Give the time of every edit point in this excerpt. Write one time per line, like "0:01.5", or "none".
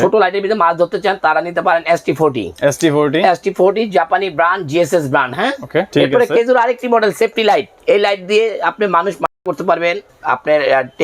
0:05.9
0:07.7